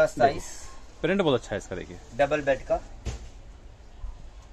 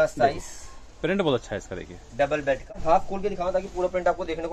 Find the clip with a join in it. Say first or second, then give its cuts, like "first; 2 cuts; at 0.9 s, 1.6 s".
second; 1 cut; at 2.7 s